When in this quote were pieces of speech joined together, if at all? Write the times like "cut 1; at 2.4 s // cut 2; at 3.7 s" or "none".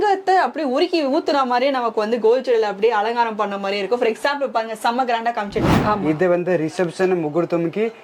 cut 1; at 5.7 s